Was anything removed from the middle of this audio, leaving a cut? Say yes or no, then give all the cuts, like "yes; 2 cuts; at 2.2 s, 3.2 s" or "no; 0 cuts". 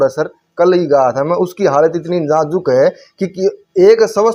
no; 0 cuts